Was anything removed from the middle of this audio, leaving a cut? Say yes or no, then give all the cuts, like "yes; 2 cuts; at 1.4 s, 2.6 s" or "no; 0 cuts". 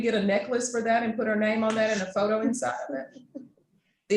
no; 0 cuts